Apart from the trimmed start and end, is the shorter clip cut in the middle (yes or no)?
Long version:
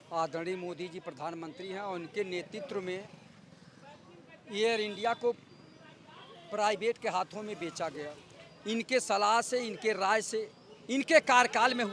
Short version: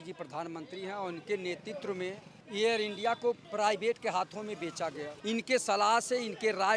yes